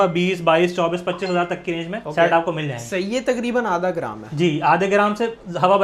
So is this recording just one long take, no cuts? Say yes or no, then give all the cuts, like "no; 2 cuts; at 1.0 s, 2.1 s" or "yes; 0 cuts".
yes; 0 cuts